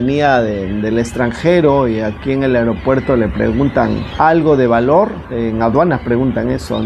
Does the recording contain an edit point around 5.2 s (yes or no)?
yes